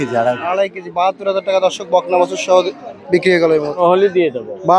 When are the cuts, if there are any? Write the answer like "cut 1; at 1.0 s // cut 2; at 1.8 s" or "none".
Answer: cut 1; at 3.7 s

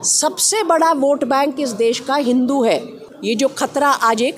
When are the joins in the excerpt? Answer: cut 1; at 3.0 s

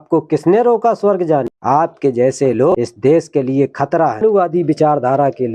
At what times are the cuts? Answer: cut 1; at 1.5 s // cut 2; at 2.7 s // cut 3; at 4.2 s

